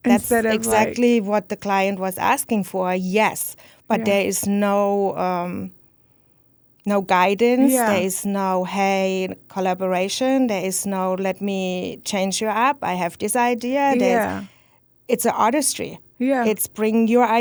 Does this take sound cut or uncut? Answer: uncut